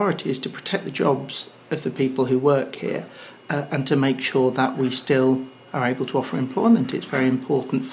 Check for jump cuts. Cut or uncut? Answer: uncut